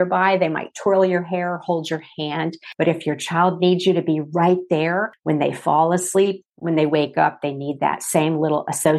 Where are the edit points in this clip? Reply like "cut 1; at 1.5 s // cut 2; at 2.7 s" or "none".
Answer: cut 1; at 2.6 s // cut 2; at 5.1 s // cut 3; at 6.5 s